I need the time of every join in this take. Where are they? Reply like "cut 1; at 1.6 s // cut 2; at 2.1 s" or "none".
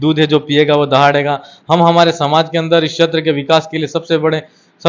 none